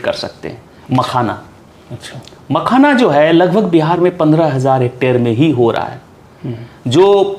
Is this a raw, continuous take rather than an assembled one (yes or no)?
yes